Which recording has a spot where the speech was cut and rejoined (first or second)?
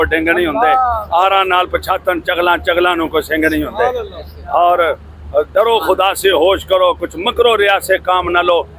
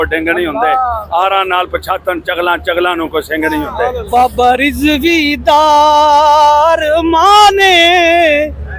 second